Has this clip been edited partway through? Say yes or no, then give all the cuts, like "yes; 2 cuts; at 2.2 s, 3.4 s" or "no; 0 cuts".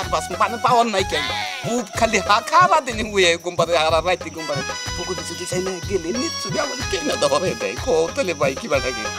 no; 0 cuts